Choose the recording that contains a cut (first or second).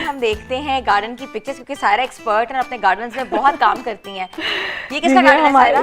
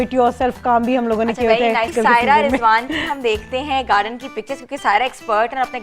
second